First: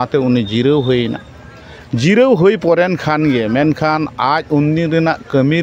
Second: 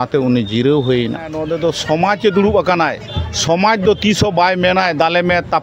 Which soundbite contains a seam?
second; 1 cut; at 1.4 s

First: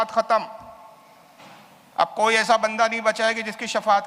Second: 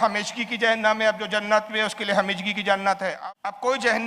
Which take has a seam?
second; 1 cut; at 3.1 s

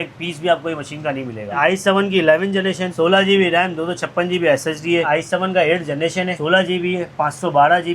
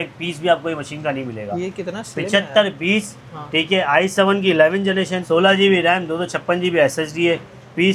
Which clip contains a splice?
first; 2 cuts; at 1.5 s, 5.1 s

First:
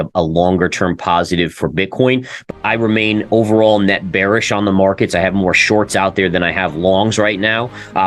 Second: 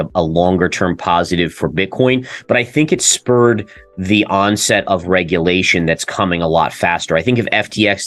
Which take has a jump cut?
first; 1 cut; at 2.5 s

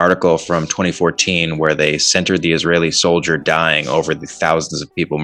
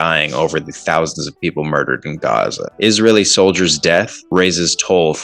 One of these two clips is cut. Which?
second; 2 cuts; at 2.6 s, 4.2 s

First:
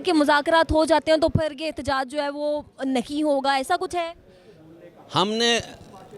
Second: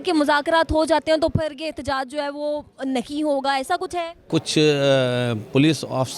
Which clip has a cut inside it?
second; 1 cut; at 4.2 s

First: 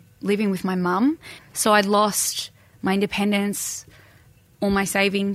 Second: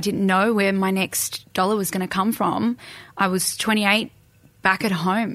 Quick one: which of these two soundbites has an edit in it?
first; 1 cut; at 1.3 s

